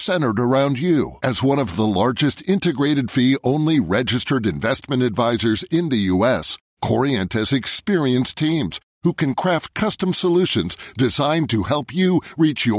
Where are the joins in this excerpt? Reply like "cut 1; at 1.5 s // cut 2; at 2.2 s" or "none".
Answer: none